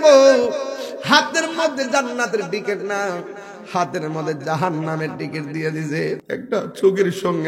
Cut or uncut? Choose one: cut